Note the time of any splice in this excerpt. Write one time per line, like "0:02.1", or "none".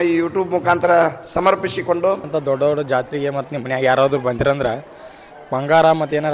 0:02.2